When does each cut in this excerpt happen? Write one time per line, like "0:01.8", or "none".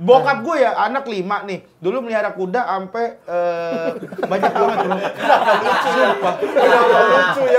none